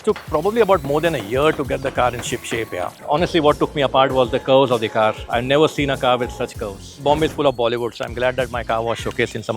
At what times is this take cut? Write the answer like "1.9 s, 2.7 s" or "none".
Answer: 3.0 s, 6.8 s